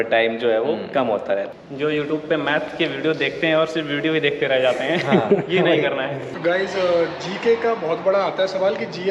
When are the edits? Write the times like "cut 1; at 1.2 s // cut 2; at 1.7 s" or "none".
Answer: cut 1; at 1.5 s // cut 2; at 6.2 s